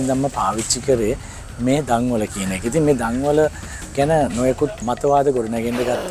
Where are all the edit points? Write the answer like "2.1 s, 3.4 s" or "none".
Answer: 4.8 s